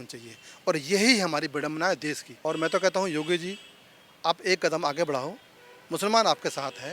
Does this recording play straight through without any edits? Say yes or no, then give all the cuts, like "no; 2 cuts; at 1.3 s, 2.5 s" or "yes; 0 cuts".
no; 1 cut; at 2.3 s